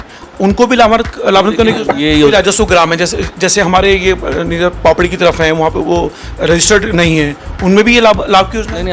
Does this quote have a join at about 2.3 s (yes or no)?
yes